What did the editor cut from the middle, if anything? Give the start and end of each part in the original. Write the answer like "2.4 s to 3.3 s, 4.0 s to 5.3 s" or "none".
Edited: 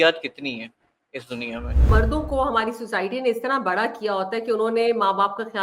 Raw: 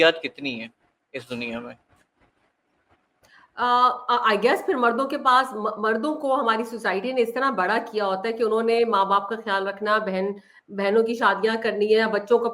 1.8 s to 5.8 s